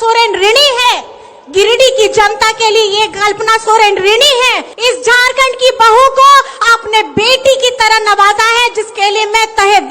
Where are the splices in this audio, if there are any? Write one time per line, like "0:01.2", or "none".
0:04.7